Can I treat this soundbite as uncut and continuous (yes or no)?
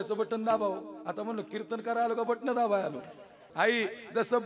no